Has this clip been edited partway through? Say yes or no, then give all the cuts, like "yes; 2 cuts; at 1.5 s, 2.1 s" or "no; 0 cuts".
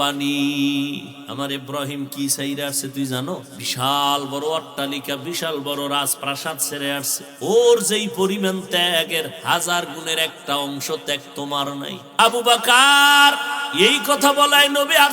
yes; 5 cuts; at 1.2 s, 3.6 s, 7.2 s, 12.0 s, 13.6 s